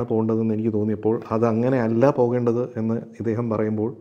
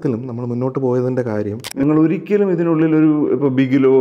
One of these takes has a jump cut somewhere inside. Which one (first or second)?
second